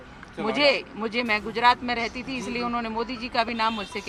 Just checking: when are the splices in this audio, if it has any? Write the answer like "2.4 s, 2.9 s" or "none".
none